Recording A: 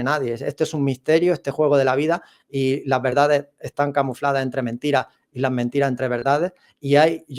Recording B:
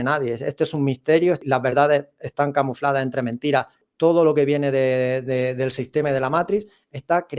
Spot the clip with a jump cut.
B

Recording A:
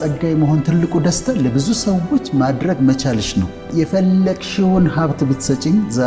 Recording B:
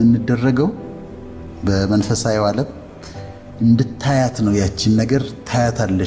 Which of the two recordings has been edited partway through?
A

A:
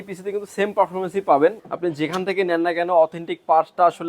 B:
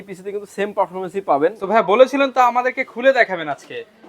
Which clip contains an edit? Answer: A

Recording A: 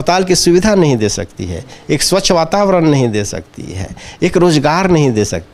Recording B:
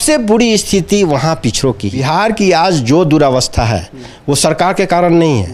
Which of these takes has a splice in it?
B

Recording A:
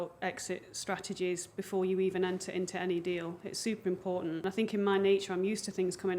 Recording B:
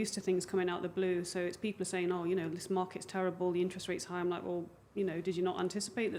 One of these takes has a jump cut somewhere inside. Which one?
A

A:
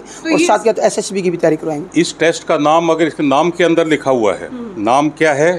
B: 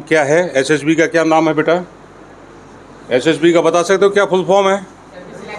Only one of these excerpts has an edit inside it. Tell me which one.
A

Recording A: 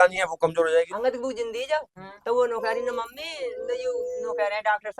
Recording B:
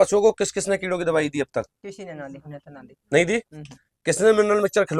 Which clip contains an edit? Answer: A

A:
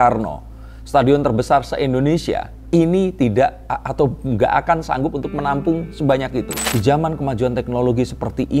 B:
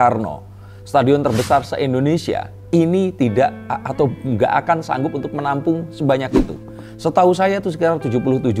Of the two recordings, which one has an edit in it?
A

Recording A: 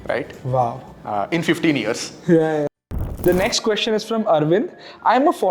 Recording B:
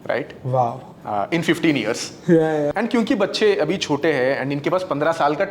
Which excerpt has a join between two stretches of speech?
A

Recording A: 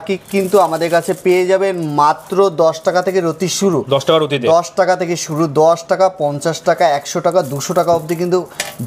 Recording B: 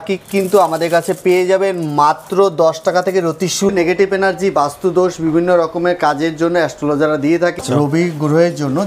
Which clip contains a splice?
B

